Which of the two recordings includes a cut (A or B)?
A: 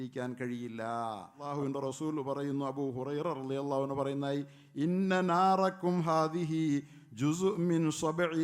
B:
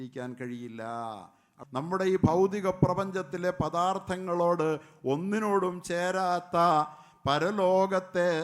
B